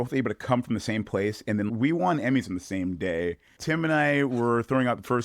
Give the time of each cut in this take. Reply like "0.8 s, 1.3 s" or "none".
1.7 s, 3.5 s